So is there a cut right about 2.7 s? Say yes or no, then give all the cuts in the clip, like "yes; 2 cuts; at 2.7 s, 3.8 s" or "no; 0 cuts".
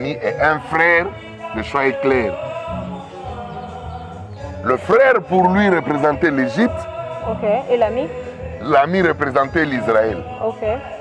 no; 0 cuts